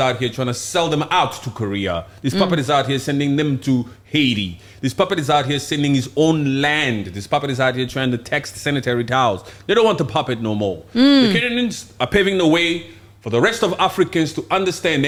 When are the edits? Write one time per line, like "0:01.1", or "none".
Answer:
none